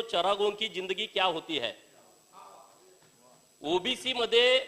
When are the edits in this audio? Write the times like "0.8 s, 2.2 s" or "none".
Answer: none